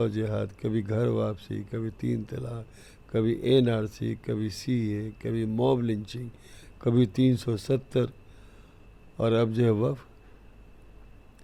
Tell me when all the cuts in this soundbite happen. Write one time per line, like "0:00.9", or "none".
none